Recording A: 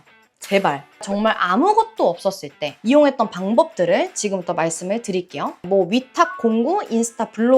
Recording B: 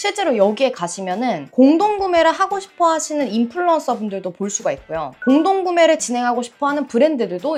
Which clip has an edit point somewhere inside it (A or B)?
A